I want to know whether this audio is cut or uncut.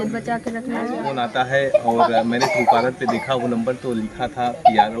cut